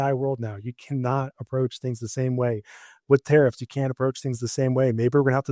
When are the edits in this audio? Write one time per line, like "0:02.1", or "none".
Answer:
none